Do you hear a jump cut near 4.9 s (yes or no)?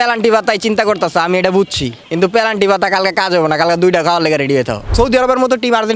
yes